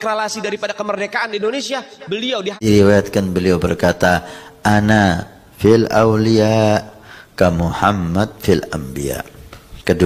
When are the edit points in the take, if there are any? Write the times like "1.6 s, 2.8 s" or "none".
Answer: 2.6 s